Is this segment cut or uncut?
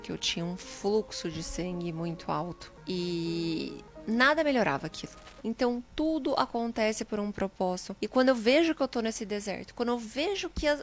cut